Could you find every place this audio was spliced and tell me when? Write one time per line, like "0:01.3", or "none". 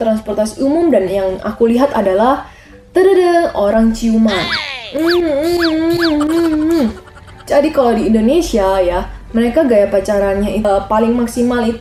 none